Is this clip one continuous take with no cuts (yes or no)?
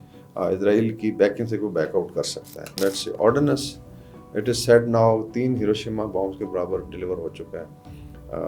no